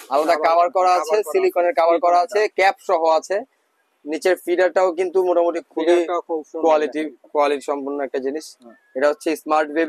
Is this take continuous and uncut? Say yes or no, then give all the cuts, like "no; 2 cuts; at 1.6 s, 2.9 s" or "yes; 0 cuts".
yes; 0 cuts